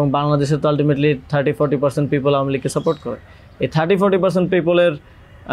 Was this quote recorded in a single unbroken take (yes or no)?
yes